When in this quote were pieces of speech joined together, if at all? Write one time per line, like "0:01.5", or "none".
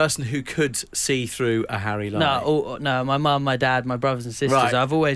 none